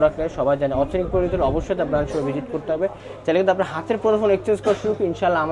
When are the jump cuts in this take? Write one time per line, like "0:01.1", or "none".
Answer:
none